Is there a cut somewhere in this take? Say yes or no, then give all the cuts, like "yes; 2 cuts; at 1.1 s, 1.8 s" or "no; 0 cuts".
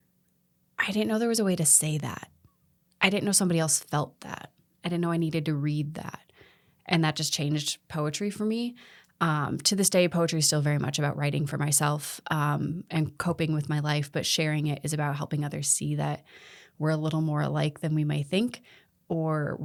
no; 0 cuts